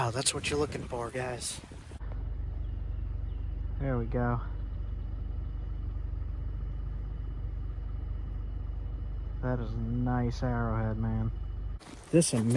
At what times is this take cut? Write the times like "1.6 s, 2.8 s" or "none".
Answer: 2.0 s, 11.6 s